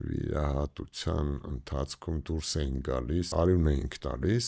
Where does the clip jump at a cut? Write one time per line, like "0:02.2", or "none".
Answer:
0:03.3